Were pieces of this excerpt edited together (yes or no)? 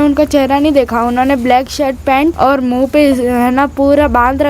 yes